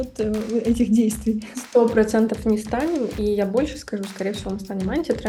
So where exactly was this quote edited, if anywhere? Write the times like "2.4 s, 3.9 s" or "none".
none